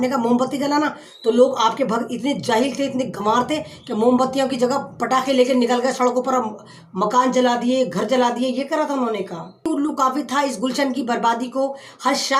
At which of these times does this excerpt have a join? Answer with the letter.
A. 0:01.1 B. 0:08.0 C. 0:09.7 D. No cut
C